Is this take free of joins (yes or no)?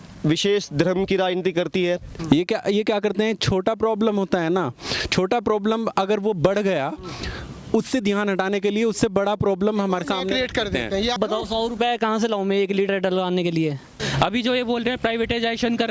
no